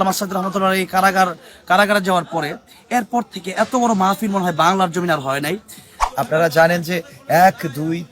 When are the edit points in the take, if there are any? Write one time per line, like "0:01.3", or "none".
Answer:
0:06.0